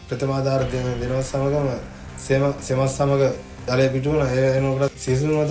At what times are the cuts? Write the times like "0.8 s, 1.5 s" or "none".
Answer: none

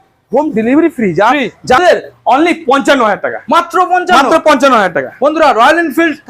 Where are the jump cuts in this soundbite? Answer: 1.8 s

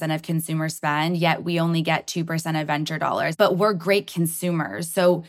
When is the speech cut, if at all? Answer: 3.3 s

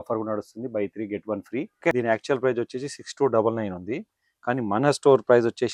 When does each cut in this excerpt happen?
1.9 s

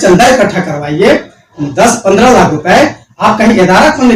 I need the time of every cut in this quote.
none

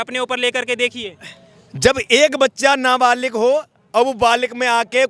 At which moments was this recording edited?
none

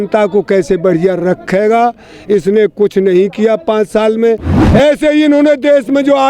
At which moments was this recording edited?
4.5 s

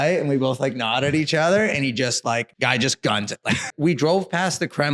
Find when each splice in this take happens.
2.5 s, 3.7 s

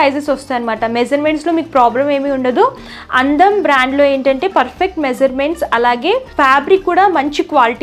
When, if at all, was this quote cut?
none

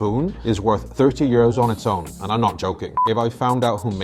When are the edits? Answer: 2.9 s

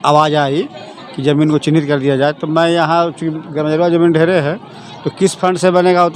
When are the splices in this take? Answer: none

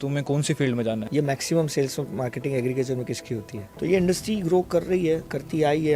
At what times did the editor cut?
1.1 s, 3.6 s

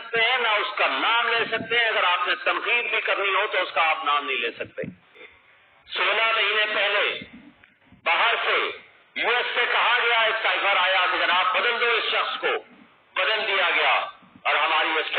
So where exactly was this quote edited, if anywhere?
5.3 s

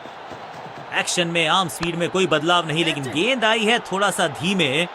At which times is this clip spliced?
0.9 s

